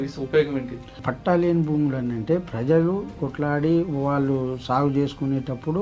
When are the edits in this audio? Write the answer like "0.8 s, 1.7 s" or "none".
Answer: 1.0 s, 3.3 s